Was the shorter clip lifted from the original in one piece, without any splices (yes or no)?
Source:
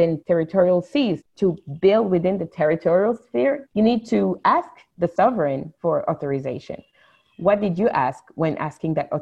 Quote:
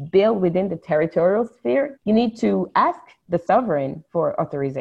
yes